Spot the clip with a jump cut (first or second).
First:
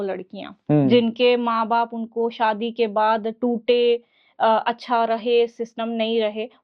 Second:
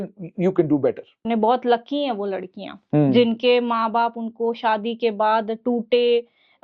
second